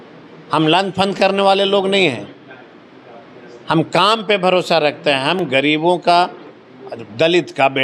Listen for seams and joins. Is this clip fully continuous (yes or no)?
yes